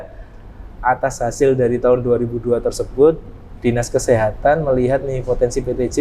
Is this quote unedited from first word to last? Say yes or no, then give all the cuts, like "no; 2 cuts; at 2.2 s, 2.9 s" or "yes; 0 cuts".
yes; 0 cuts